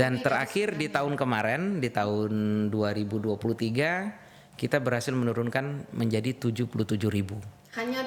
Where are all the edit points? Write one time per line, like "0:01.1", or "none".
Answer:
none